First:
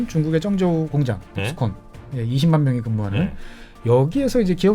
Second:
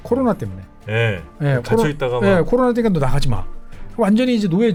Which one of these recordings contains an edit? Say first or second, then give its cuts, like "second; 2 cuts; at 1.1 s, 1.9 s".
first; 1 cut; at 0.9 s